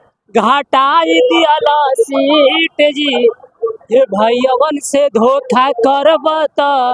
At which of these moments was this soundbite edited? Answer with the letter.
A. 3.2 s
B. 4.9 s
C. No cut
C